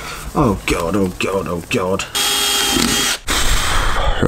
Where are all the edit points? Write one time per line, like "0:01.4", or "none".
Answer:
0:02.1
0:03.2